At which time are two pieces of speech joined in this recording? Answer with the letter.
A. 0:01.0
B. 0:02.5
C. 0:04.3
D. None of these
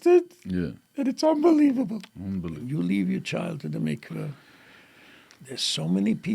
B